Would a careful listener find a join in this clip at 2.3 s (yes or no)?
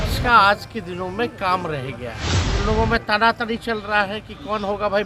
yes